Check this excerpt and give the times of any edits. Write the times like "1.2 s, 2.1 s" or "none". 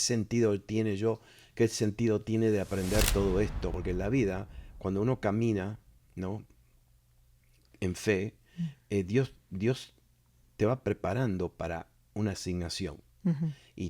3.7 s